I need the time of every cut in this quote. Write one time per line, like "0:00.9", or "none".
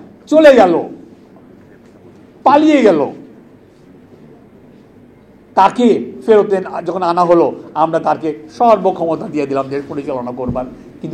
none

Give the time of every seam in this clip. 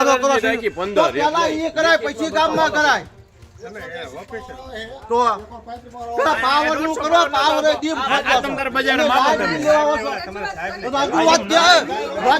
none

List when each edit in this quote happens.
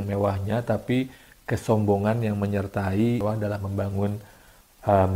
0:03.2

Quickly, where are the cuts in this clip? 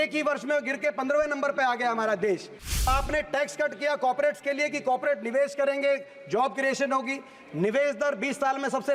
0:02.9

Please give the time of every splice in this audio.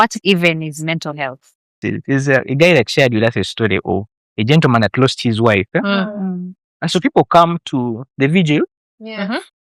0:01.8

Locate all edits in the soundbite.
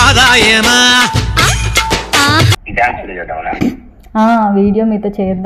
0:02.6

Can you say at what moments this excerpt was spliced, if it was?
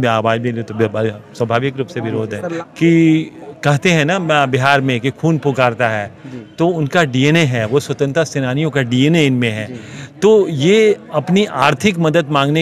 0:02.5

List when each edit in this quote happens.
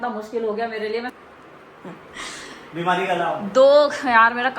0:01.1

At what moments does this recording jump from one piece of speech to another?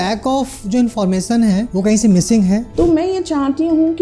0:01.7
0:02.7

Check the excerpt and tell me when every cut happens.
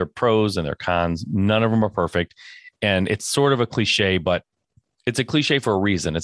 none

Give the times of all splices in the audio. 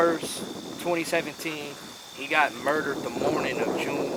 none

